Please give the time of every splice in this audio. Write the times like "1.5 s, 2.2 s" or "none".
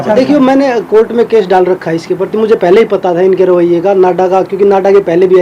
none